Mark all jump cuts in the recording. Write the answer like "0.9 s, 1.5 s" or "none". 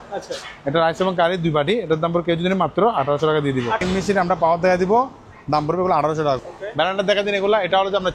3.8 s, 6.4 s